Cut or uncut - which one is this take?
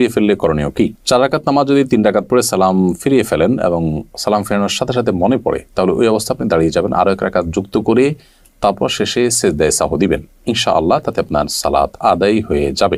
uncut